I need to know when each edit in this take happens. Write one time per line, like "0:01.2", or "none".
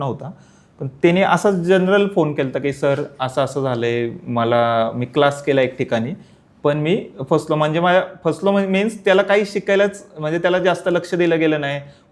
none